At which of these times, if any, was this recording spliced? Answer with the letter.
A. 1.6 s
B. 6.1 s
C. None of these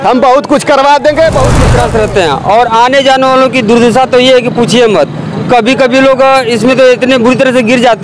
A